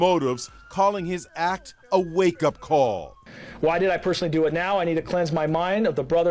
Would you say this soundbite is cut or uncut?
uncut